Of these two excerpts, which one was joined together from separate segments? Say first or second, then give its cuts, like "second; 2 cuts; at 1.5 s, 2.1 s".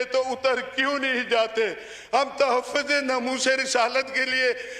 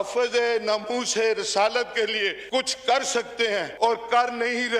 second; 2 cuts; at 2.4 s, 3.7 s